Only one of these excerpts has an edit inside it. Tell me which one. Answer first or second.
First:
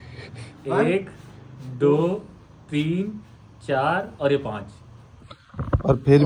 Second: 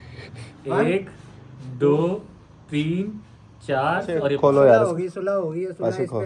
second